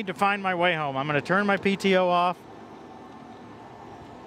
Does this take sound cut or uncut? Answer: uncut